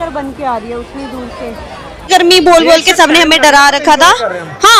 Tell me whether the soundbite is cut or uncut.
cut